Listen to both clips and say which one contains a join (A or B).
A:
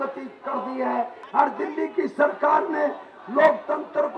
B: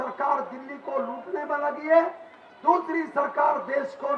A